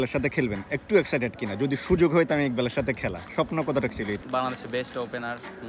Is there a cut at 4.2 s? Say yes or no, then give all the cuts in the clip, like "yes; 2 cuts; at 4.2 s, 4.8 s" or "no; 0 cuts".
yes; 1 cut; at 4.2 s